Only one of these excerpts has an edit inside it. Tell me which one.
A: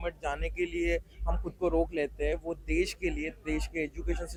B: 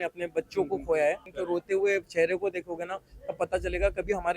B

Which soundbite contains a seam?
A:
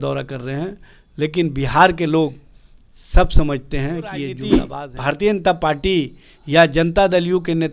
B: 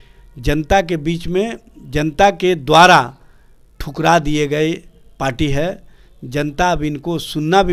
A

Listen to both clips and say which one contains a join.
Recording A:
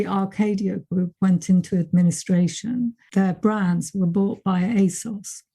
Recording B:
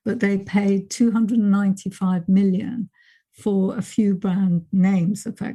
A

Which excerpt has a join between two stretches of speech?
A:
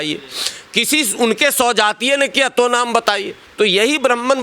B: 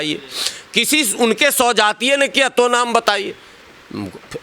A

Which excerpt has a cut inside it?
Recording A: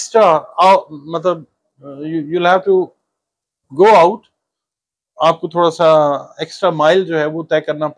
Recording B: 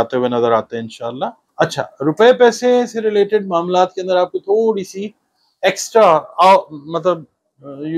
B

